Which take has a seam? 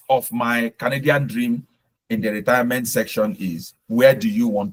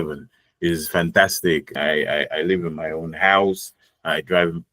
second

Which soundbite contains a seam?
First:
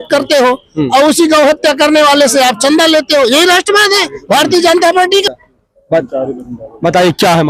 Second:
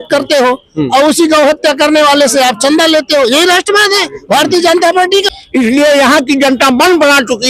second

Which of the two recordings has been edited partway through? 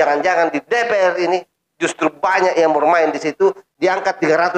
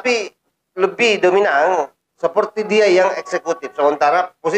first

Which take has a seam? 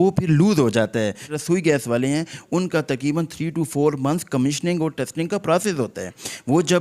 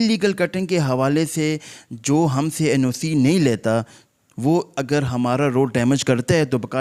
first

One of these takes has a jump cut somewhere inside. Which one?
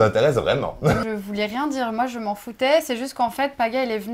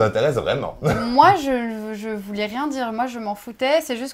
first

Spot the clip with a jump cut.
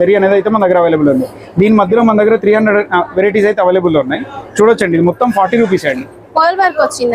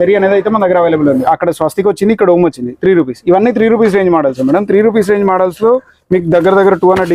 second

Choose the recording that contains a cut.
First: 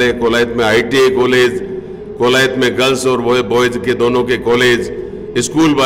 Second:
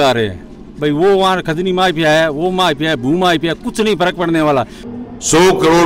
second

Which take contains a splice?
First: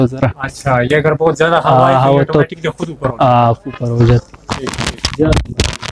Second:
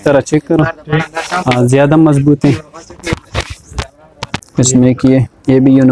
second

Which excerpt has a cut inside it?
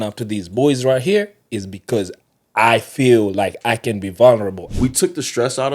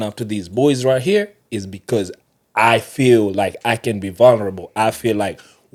first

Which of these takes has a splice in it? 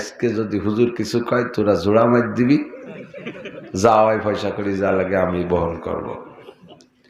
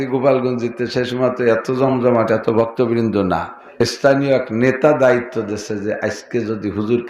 second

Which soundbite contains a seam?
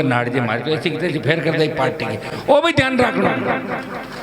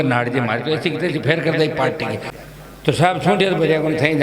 second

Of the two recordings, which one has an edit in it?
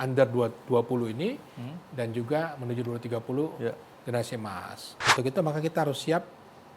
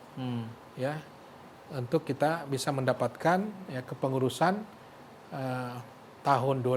first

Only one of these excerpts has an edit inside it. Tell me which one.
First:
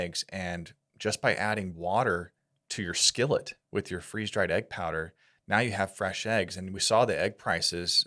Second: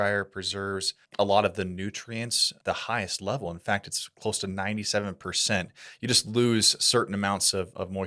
second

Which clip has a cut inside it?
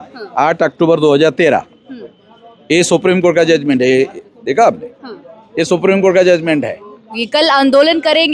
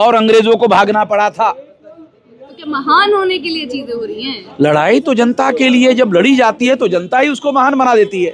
first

